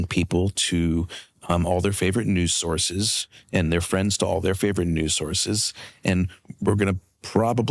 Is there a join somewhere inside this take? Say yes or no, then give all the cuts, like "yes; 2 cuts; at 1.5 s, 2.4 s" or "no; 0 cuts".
no; 0 cuts